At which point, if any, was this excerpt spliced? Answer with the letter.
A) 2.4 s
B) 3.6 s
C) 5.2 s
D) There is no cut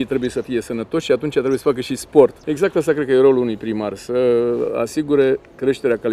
A